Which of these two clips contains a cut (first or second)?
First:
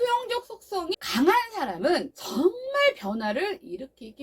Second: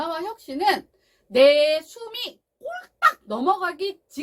first